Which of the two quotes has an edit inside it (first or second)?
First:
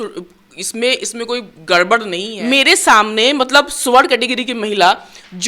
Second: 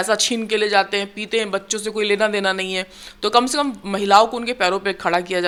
first